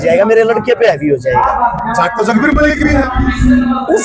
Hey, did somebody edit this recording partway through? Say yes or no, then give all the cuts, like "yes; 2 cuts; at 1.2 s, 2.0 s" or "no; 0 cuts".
no; 0 cuts